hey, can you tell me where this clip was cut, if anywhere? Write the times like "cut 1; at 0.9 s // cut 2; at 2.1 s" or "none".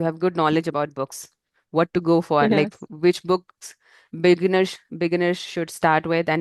none